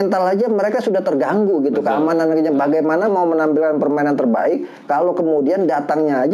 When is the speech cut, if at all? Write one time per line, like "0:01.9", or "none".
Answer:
none